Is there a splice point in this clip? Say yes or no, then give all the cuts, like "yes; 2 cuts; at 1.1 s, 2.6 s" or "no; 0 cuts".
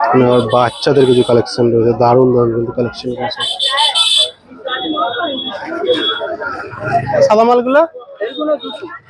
yes; 1 cut; at 7.3 s